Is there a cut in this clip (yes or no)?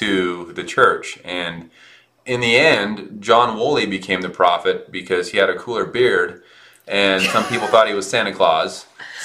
yes